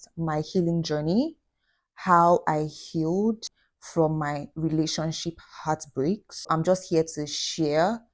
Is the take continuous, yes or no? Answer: no